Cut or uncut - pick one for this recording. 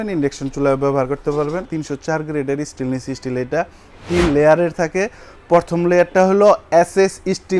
cut